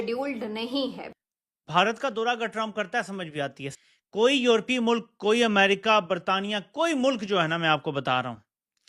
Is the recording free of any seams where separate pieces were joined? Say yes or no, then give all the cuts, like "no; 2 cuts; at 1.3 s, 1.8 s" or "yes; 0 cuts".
no; 2 cuts; at 1.0 s, 3.6 s